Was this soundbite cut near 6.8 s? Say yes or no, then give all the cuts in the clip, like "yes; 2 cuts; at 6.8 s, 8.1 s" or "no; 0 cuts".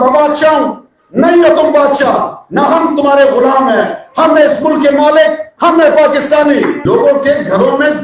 yes; 1 cut; at 6.8 s